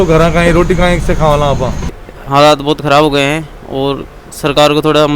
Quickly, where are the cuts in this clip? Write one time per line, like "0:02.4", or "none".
0:01.9